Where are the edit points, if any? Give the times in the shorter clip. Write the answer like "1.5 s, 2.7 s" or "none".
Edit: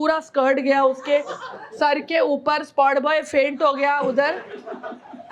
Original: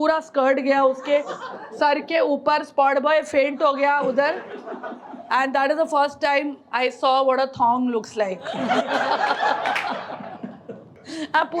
none

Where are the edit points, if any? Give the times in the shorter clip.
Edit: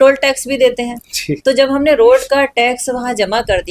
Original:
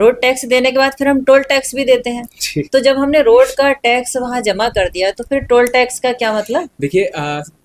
none

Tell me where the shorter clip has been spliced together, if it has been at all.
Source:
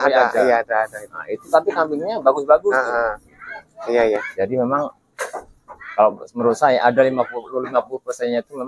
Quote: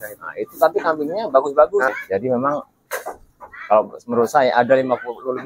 1.9 s

